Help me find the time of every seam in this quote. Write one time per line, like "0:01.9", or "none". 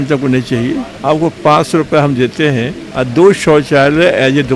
0:00.9
0:02.8

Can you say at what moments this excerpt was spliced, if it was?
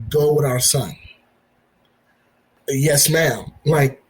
0:02.5

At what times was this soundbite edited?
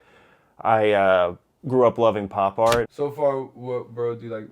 0:02.9

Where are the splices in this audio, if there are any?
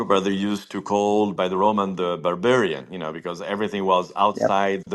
none

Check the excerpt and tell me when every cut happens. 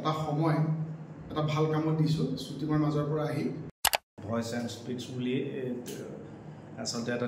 0:03.9

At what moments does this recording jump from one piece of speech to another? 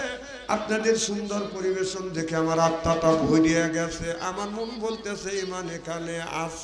none

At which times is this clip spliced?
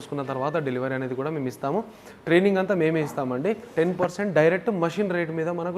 0:03.6

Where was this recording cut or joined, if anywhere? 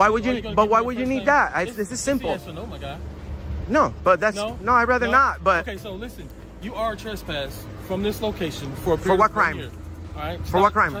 none

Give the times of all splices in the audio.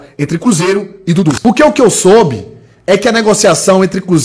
0:01.4

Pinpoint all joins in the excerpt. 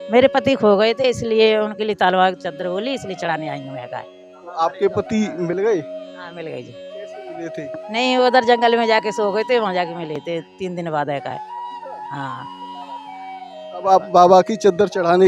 none

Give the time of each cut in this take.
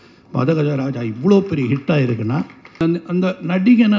0:02.8

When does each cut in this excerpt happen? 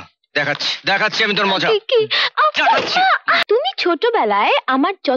0:03.3

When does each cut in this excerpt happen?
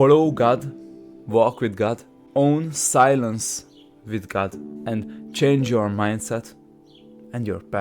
0:02.1
0:04.7

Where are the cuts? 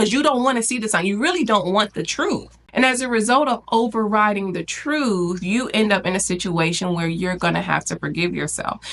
0:02.6

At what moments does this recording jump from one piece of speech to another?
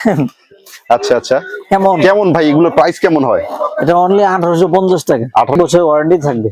0:05.5

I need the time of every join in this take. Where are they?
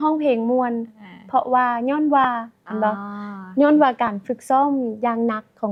none

